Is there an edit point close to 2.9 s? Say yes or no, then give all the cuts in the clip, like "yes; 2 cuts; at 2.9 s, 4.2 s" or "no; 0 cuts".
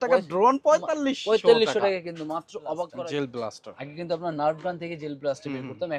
yes; 1 cut; at 2.9 s